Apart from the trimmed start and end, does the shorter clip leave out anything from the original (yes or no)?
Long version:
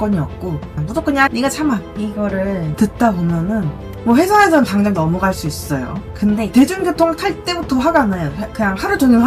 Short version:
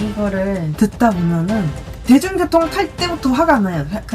yes